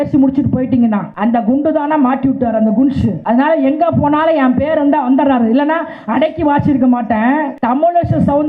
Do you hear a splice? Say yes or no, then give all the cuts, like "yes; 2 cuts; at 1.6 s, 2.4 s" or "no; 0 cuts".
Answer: yes; 3 cuts; at 1.1 s, 3.2 s, 7.5 s